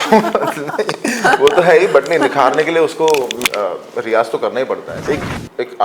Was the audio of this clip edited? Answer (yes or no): yes